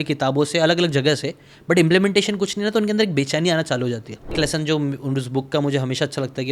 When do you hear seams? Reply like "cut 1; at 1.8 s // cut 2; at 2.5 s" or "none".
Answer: cut 1; at 4.4 s